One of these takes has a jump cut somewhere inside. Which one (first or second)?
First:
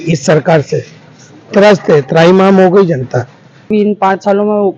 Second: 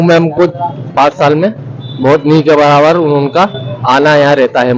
first